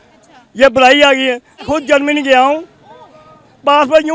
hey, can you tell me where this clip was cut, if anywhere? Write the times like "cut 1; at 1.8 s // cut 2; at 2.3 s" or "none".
cut 1; at 1.5 s